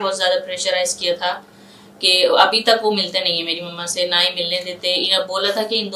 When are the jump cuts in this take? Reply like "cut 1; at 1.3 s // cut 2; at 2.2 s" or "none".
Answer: none